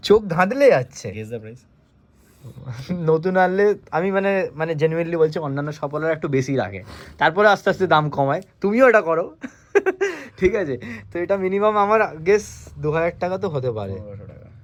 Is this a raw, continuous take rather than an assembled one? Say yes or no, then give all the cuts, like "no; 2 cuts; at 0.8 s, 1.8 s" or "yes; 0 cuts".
yes; 0 cuts